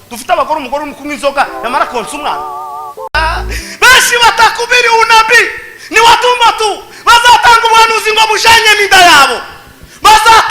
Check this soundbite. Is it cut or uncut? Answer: cut